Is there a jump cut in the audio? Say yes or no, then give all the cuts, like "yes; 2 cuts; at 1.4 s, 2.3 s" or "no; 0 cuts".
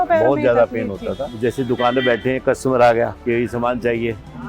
yes; 2 cuts; at 1.3 s, 3.2 s